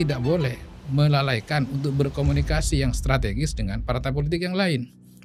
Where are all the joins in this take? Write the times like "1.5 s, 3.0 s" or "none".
none